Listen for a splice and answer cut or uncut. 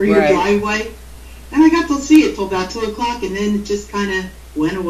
cut